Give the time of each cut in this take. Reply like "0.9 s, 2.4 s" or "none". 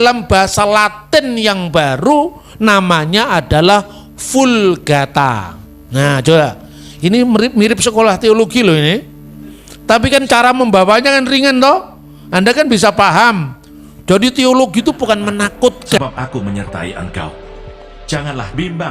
16.0 s